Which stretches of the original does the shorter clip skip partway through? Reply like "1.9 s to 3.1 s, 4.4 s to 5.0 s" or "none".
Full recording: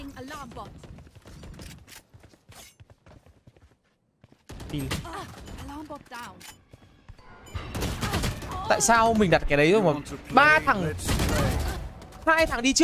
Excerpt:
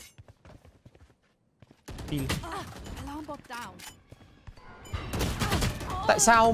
none